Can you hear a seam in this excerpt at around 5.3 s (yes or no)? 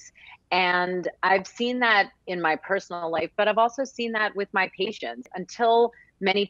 yes